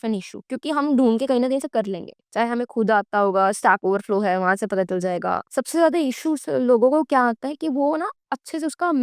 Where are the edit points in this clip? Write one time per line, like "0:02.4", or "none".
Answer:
0:05.4